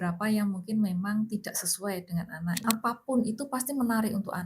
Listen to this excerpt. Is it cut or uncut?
cut